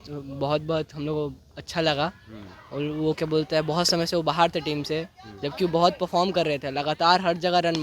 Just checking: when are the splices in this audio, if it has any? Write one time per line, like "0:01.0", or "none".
none